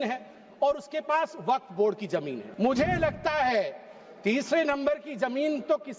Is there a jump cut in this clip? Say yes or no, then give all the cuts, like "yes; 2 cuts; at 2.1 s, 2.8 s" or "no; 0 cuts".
yes; 1 cut; at 2.4 s